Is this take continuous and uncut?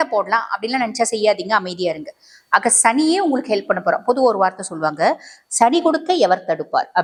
yes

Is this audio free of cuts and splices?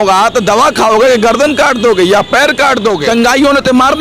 no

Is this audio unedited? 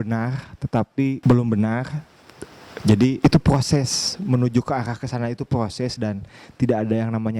yes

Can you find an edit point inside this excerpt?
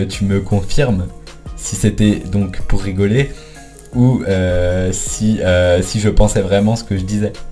no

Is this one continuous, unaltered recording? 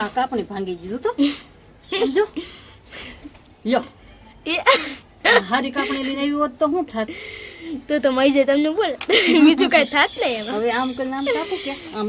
yes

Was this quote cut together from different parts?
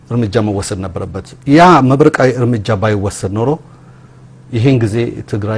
no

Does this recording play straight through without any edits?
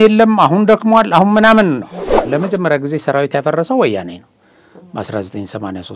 no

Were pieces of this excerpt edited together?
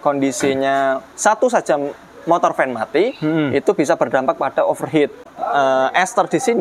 yes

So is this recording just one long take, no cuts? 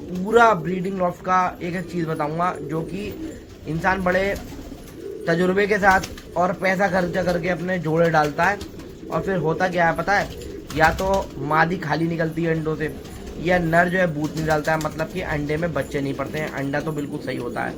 yes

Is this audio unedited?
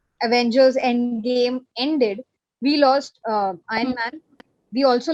yes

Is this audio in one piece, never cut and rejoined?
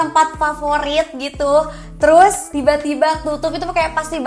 no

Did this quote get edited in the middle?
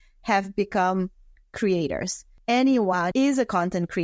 yes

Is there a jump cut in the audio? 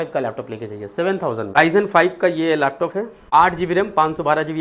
yes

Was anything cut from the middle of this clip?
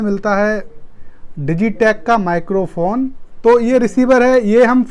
yes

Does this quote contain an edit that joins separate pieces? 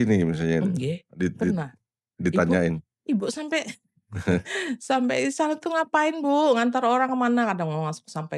no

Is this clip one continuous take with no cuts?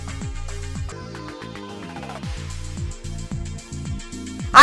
yes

